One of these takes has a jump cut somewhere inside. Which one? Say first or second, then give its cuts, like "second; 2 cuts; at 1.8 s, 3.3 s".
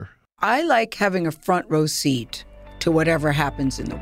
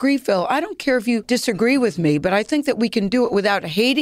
second; 1 cut; at 1.2 s